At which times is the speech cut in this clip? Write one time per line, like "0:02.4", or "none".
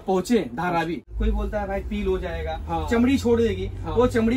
0:01.1